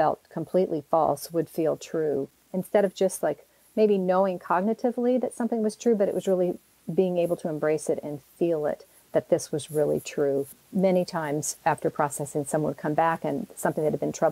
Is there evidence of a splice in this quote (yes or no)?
no